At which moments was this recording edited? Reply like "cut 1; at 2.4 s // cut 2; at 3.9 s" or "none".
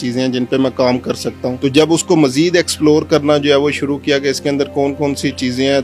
cut 1; at 1.6 s